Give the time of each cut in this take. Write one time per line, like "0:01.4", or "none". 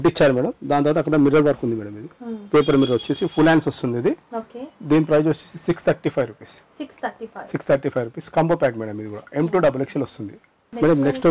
none